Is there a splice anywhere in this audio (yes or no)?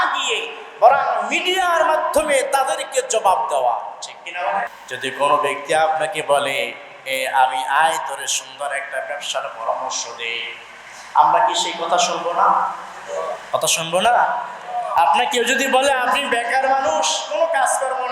yes